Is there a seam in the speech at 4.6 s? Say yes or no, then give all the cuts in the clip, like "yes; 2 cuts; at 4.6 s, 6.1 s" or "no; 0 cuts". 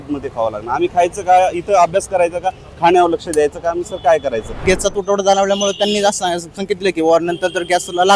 yes; 1 cut; at 4.6 s